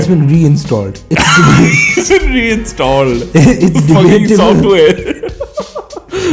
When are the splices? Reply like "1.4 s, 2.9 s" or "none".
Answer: none